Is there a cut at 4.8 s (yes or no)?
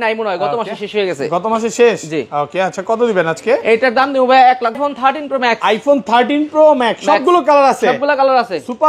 yes